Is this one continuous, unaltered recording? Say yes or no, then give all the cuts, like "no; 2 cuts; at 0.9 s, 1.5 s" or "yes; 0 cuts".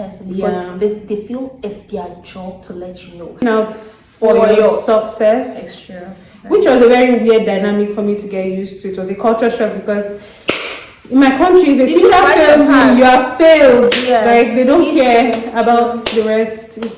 no; 1 cut; at 3.4 s